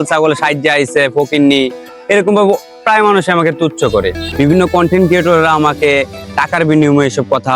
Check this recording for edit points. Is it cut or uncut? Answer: cut